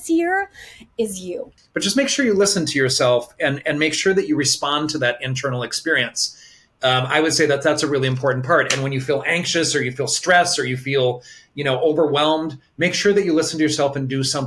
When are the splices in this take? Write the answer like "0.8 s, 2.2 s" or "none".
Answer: 1.5 s